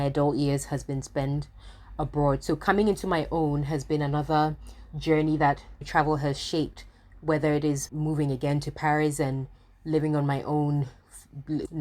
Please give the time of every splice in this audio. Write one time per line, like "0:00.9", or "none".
0:07.9

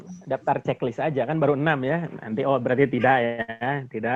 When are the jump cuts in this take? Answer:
none

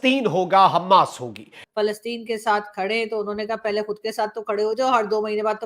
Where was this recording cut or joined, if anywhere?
0:01.6

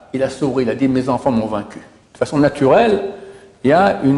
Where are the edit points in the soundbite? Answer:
0:02.0

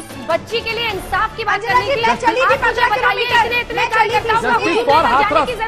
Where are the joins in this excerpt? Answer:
none

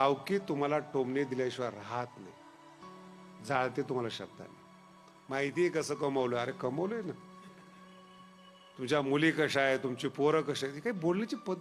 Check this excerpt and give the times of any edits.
none

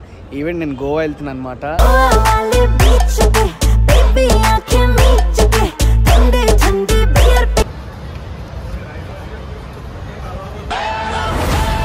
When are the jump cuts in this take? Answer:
0:07.8

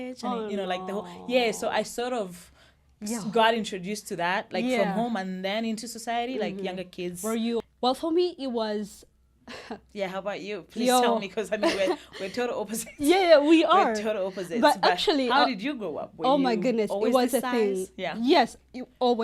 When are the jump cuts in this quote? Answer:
0:07.7

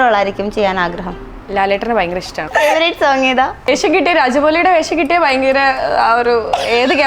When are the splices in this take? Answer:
0:02.5
0:03.7

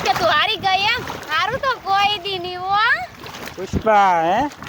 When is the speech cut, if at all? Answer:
none

